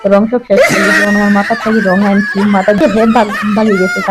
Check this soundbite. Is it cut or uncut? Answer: cut